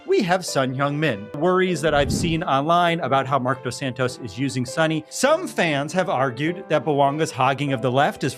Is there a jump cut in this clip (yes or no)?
yes